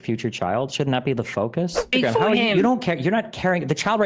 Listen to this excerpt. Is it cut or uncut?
cut